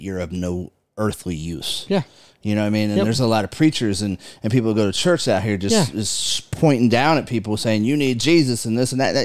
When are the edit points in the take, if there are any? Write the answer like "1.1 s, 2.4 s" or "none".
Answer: none